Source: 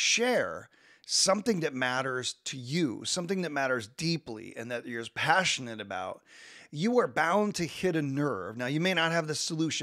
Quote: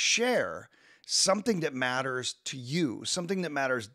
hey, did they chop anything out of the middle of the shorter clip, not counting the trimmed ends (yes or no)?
no